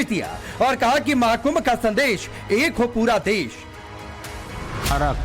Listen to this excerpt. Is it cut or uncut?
cut